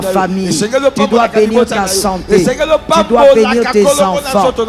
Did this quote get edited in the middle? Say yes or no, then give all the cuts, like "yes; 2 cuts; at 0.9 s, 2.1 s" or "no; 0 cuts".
no; 0 cuts